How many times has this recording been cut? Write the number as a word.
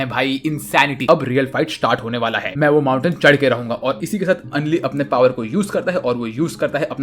two